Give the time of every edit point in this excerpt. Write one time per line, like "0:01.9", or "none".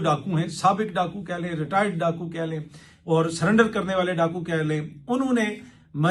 none

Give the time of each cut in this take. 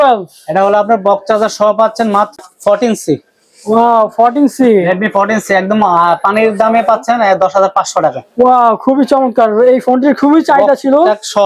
0:02.4

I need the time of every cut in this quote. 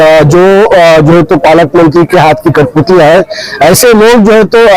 none

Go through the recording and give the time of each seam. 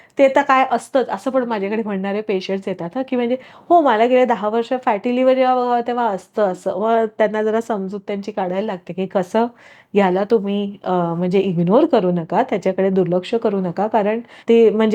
none

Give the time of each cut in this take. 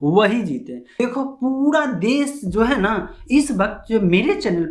0:01.0

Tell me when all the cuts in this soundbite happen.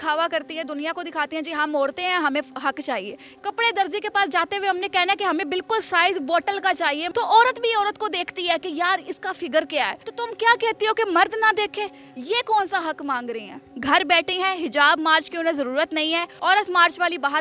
0:03.3
0:07.0
0:10.0
0:13.7
0:16.3

